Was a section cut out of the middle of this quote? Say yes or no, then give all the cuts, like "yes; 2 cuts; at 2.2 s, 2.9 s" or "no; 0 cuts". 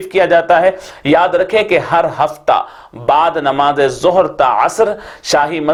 no; 0 cuts